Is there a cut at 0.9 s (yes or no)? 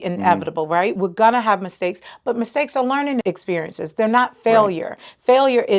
yes